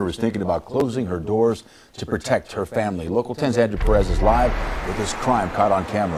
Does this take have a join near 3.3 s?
yes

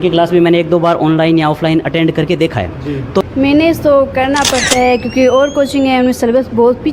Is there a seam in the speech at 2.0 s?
no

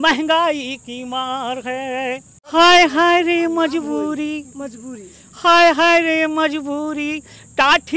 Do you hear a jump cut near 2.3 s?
yes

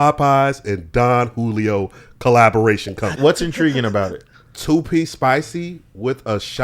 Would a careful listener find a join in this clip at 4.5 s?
no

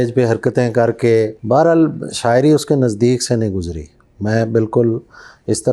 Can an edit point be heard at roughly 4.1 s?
no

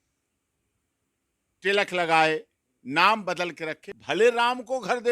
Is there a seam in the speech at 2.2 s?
no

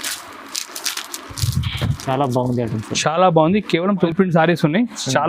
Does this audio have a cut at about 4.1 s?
yes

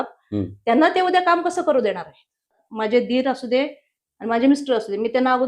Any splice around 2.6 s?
yes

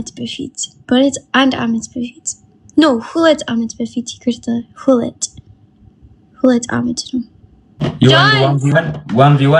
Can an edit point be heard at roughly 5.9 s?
no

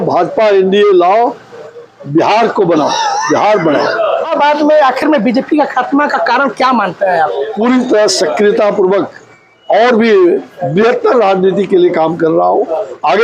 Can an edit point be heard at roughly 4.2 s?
yes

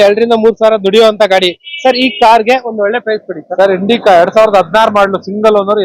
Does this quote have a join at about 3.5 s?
no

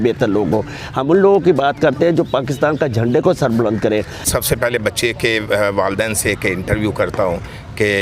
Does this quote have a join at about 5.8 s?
no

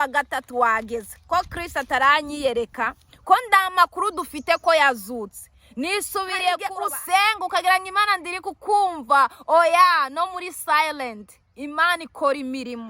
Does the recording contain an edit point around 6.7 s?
yes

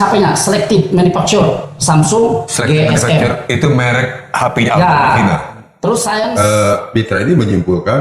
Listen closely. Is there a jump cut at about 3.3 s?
no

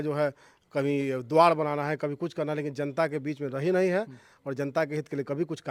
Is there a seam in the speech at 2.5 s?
no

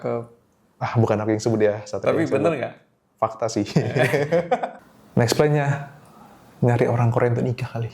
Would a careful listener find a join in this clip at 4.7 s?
yes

